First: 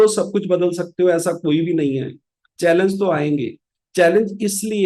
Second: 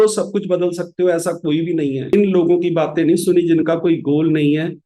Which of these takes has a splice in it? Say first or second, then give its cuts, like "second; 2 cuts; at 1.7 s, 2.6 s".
second; 1 cut; at 2.1 s